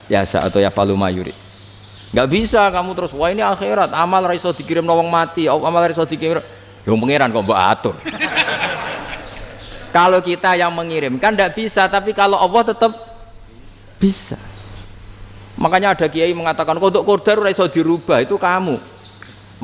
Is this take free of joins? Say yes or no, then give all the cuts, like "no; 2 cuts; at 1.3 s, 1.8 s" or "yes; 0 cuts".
yes; 0 cuts